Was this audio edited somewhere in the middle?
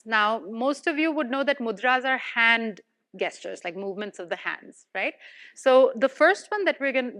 no; 0 cuts

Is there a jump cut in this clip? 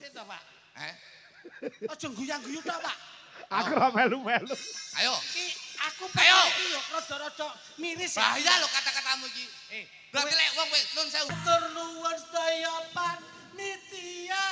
yes; 1 cut; at 11.4 s

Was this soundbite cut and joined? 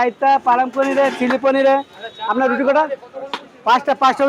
no; 0 cuts

